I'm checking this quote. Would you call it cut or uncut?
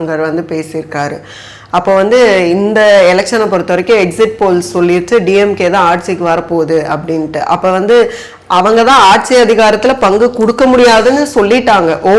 uncut